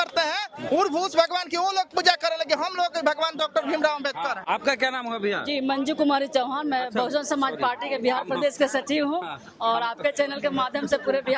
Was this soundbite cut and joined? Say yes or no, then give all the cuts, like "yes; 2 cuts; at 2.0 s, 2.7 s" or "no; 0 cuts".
no; 0 cuts